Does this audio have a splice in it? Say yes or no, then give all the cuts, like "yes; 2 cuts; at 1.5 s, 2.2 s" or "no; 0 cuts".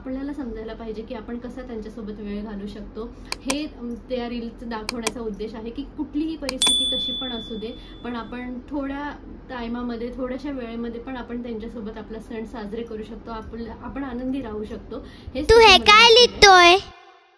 yes; 1 cut; at 15.5 s